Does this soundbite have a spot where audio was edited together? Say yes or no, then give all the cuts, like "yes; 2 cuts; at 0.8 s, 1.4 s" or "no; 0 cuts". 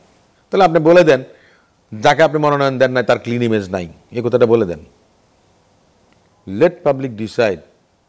no; 0 cuts